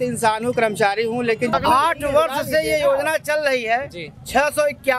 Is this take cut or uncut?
cut